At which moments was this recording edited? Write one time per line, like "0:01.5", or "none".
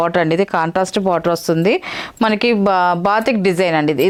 none